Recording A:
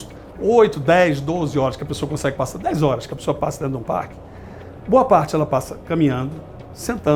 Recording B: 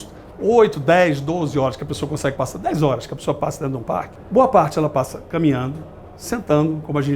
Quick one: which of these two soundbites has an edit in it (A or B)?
B